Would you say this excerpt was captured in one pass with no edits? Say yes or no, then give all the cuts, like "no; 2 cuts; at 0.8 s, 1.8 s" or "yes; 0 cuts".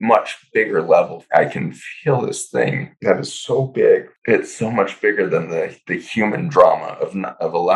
no; 3 cuts; at 1.2 s, 2.9 s, 4.1 s